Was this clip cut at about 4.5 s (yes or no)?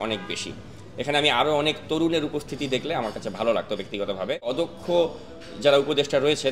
yes